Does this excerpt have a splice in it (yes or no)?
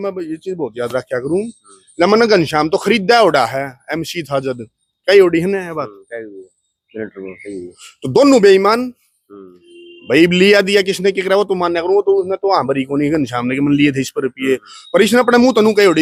no